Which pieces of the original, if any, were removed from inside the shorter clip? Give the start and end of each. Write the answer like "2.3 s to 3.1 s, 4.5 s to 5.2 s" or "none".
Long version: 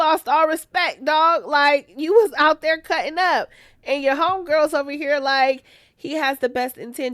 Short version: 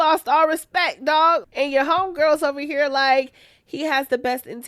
1.4 s to 3.8 s